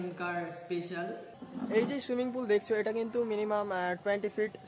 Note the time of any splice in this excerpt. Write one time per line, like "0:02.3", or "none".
0:01.3